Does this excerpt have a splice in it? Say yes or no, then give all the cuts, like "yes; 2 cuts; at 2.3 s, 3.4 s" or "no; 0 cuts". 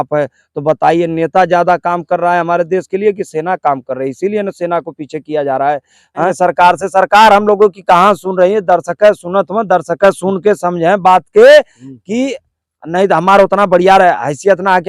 yes; 1 cut; at 6.3 s